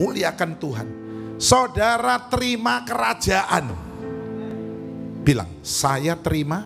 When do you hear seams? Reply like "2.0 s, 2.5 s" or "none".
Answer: none